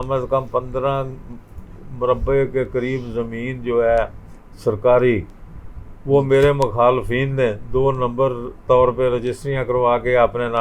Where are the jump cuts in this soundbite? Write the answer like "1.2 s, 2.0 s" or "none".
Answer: none